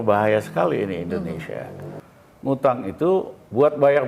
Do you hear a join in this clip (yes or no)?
yes